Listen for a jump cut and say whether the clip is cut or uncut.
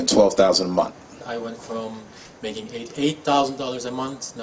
cut